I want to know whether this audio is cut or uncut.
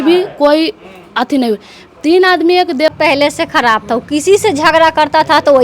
cut